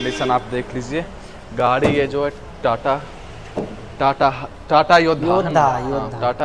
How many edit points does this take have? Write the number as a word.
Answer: zero